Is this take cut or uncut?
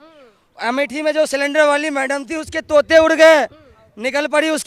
uncut